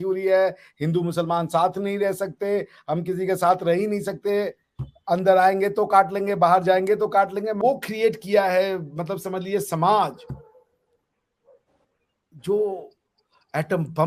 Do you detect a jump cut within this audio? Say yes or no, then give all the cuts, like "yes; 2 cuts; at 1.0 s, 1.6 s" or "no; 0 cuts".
yes; 1 cut; at 7.6 s